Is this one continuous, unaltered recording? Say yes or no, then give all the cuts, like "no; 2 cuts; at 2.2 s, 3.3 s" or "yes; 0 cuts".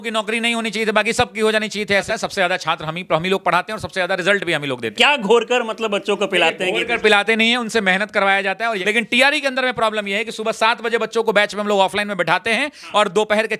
no; 3 cuts; at 2.1 s, 4.9 s, 8.8 s